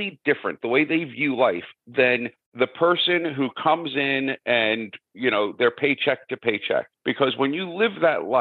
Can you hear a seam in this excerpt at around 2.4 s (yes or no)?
yes